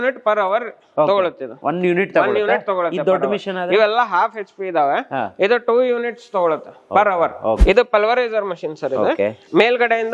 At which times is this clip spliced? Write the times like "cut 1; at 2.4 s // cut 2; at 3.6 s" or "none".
cut 1; at 1.6 s // cut 2; at 7.6 s